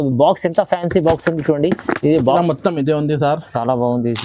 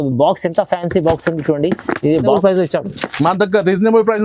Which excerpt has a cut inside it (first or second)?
first